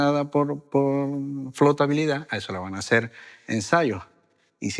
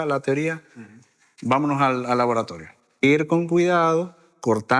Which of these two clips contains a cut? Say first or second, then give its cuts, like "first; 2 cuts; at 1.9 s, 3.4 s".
second; 1 cut; at 3.0 s